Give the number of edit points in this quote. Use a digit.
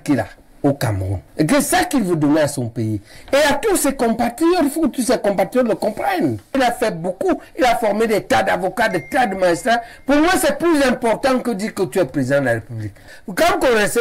2